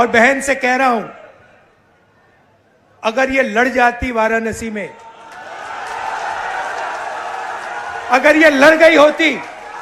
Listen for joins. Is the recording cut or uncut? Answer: uncut